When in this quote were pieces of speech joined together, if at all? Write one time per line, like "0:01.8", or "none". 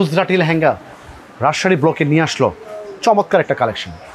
none